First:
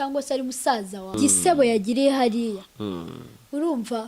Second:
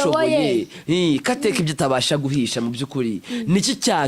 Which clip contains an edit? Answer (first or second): first